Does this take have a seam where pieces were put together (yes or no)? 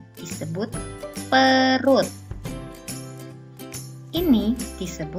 no